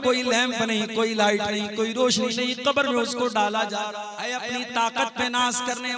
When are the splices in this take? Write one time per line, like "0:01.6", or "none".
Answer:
0:04.4